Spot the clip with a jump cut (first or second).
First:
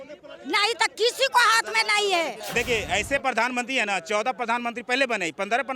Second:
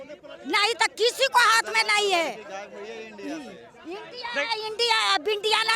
first